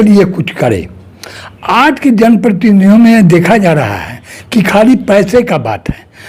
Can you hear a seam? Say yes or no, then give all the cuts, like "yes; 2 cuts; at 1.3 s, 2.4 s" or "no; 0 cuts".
no; 0 cuts